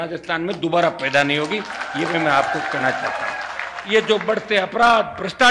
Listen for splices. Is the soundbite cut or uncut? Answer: uncut